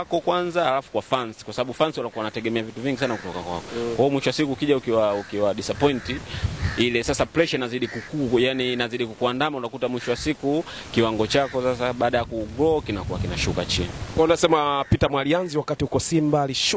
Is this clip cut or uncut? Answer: uncut